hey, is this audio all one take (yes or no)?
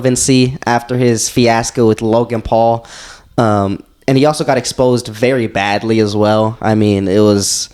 yes